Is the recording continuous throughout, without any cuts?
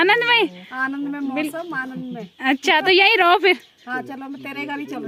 yes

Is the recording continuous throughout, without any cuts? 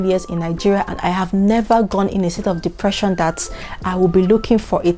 yes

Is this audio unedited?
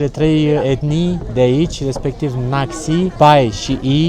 no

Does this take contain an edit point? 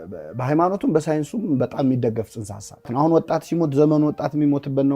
yes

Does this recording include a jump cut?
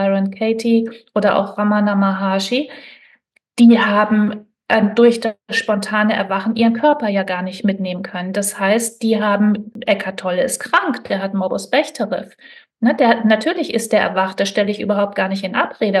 yes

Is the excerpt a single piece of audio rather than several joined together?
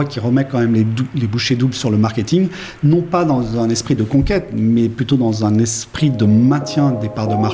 yes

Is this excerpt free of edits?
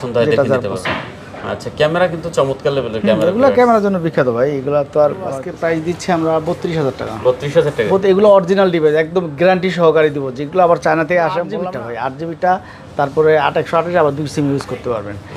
no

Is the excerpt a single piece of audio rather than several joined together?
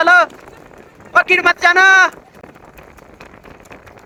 yes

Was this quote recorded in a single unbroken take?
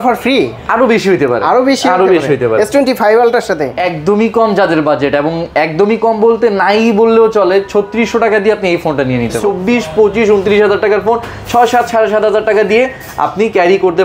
no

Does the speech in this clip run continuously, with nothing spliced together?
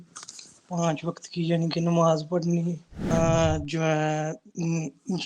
no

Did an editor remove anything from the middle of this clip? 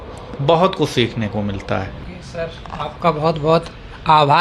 no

